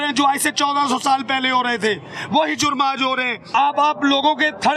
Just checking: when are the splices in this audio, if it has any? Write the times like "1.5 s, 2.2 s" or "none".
3.5 s